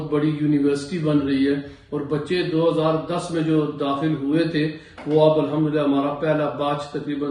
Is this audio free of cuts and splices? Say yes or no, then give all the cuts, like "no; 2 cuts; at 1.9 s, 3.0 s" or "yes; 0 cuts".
yes; 0 cuts